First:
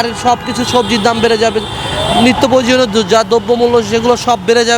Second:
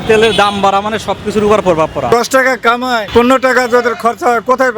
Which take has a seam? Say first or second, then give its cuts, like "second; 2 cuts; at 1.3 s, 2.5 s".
second; 2 cuts; at 2.1 s, 3.1 s